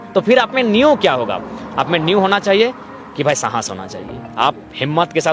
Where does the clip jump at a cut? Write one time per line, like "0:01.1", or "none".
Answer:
none

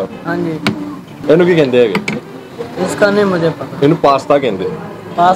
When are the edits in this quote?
0:01.1

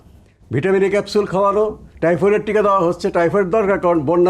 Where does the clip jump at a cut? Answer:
0:01.9

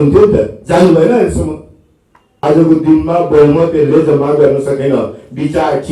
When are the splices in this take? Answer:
0:02.3

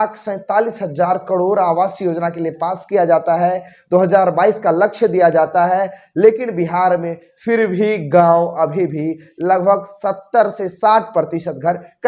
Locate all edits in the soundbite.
none

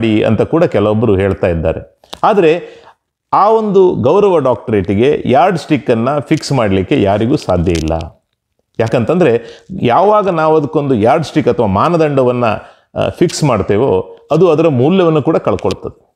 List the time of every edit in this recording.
none

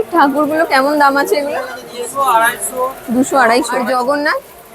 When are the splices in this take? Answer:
0:03.8

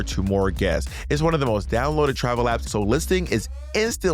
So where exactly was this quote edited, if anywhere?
0:02.7

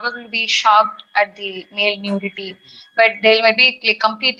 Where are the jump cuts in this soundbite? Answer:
none

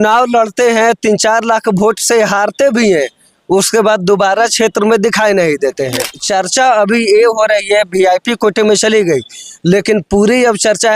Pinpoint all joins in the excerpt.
0:06.2

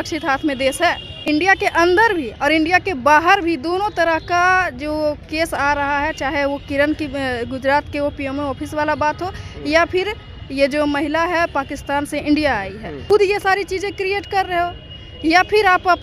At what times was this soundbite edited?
0:01.2
0:13.0

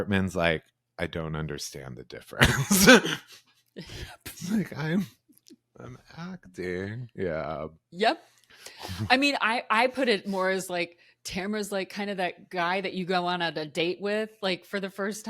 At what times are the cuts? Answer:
none

